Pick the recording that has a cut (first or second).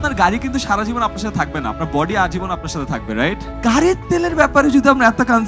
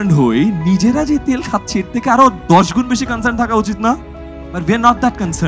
first